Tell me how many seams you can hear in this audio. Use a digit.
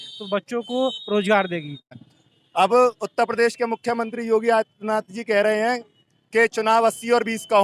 1